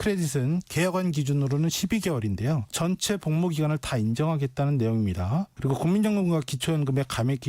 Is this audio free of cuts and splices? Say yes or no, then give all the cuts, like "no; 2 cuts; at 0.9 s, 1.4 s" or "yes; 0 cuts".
no; 1 cut; at 5.5 s